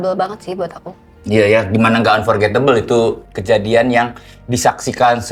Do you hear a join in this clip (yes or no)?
no